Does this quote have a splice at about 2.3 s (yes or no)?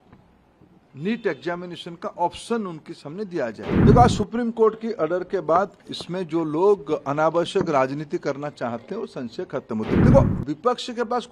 no